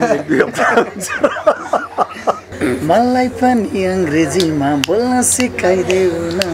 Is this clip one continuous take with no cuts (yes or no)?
no